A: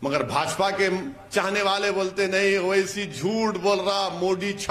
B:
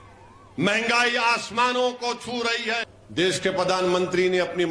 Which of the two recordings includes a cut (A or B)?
B